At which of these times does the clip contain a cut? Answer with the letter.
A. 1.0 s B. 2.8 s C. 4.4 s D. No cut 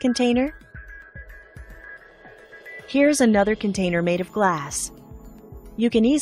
B